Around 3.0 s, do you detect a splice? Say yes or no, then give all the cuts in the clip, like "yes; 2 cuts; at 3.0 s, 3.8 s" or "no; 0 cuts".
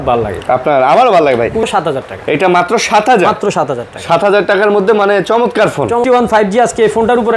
no; 2 cuts; at 1.6 s, 6.0 s